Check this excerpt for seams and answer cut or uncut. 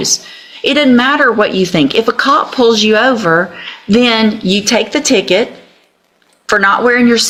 uncut